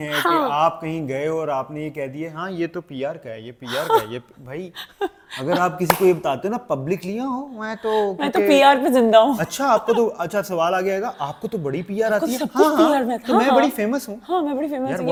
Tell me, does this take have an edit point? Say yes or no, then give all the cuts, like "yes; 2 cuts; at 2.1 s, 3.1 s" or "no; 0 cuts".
no; 0 cuts